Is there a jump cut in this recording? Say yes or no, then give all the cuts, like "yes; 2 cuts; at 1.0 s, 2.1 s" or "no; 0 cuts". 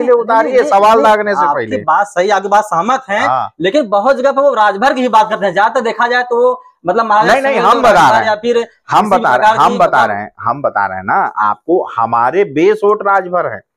no; 0 cuts